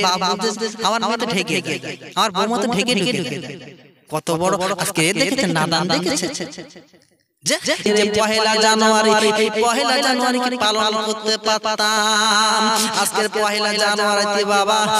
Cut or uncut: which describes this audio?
cut